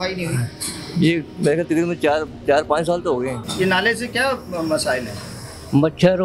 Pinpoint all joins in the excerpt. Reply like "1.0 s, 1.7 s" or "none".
3.4 s